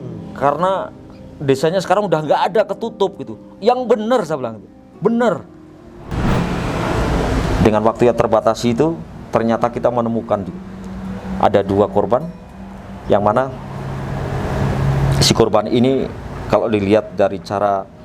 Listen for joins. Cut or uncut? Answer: cut